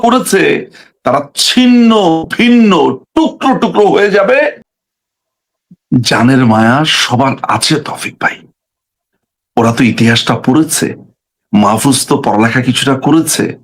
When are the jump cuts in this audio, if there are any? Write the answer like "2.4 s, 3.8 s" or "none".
4.7 s